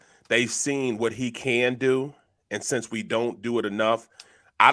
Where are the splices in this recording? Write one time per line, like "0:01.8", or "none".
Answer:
none